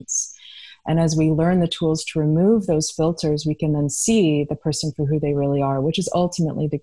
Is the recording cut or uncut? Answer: uncut